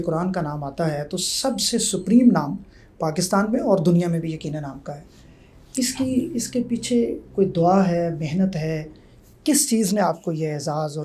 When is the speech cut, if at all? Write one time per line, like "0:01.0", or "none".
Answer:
none